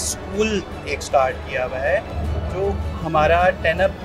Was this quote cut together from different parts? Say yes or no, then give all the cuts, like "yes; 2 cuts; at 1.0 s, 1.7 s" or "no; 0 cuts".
no; 0 cuts